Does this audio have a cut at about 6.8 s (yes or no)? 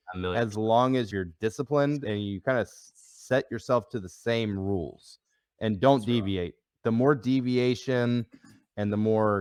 no